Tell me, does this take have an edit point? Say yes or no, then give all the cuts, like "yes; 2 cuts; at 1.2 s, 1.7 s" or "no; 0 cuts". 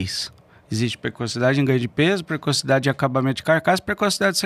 no; 0 cuts